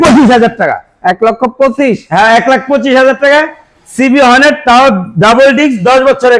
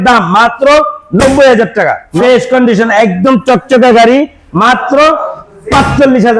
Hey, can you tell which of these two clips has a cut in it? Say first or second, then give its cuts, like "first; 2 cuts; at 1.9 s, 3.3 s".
second; 1 cut; at 2.0 s